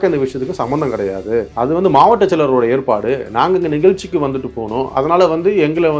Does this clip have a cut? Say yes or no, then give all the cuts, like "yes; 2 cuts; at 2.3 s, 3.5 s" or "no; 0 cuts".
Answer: no; 0 cuts